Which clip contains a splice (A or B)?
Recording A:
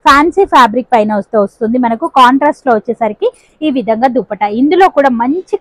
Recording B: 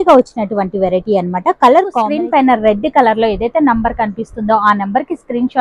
B